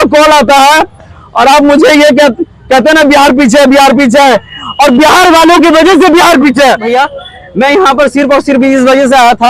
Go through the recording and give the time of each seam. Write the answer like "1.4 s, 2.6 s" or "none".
6.9 s

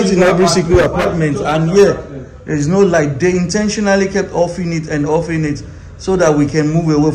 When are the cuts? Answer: none

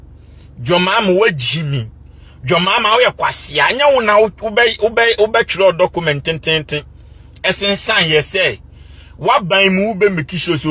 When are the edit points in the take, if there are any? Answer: none

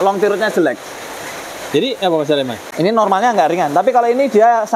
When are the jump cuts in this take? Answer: 2.6 s

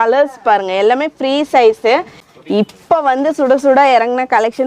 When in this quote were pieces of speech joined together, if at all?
2.2 s

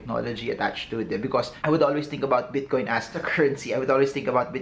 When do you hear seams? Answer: 1.5 s

